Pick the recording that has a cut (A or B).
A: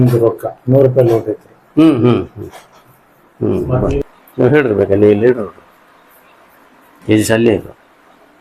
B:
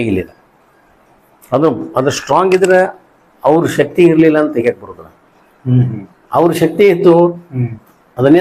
A